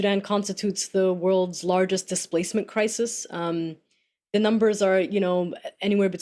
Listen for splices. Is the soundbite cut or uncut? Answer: uncut